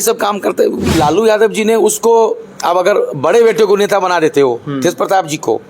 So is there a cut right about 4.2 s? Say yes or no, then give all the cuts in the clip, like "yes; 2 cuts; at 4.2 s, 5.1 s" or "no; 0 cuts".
no; 1 cut; at 0.9 s